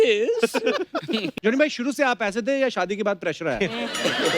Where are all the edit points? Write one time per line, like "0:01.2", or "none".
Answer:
0:01.3